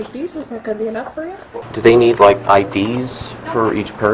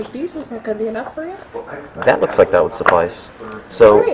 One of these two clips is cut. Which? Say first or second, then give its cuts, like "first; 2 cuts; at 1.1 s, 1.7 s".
first; 1 cut; at 1.7 s